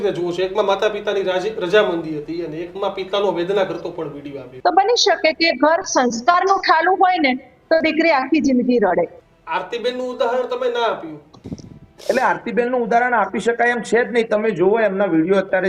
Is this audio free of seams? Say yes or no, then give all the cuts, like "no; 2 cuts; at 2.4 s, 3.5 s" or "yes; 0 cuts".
no; 2 cuts; at 4.4 s, 9.2 s